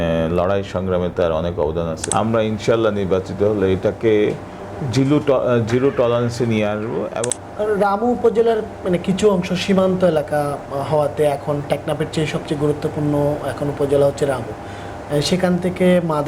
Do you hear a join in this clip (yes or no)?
yes